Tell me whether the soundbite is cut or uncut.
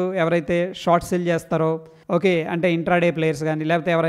cut